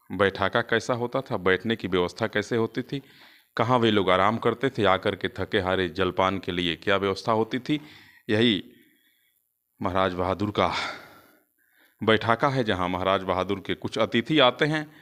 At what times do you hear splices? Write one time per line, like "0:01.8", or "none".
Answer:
none